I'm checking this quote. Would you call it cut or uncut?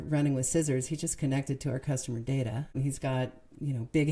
cut